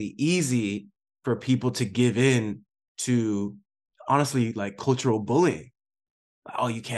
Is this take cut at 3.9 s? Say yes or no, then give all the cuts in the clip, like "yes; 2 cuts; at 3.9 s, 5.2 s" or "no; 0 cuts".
yes; 1 cut; at 3.9 s